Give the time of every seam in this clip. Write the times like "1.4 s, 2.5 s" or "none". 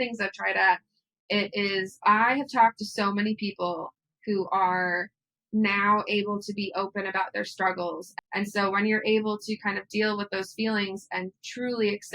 1.9 s, 8.4 s